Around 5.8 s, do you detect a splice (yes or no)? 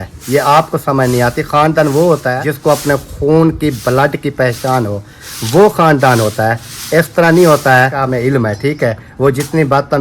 no